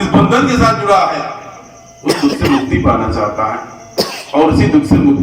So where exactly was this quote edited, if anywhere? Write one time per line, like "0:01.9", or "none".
none